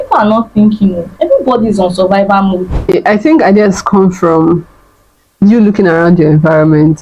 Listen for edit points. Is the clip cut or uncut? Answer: cut